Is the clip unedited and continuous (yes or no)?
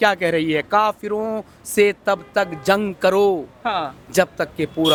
yes